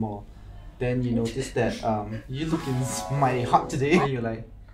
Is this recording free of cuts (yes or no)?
no